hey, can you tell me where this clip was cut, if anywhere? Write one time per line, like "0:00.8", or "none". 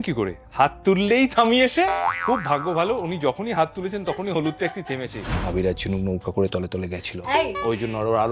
0:01.9
0:05.2

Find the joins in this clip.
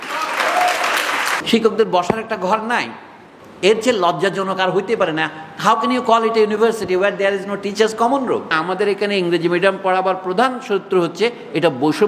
0:01.3
0:08.6

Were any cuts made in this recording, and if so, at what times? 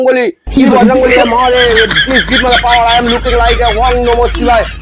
none

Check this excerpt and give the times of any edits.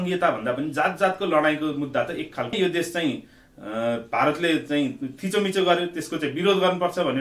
0:02.5

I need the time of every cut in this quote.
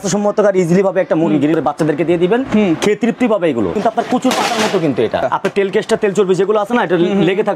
0:01.5
0:03.8
0:05.2

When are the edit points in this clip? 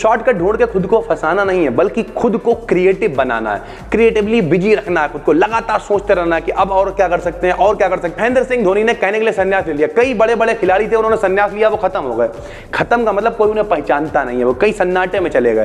0:08.2

